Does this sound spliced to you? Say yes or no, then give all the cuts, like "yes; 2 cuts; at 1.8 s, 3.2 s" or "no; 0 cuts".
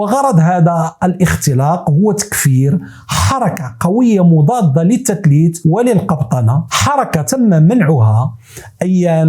yes; 1 cut; at 6.7 s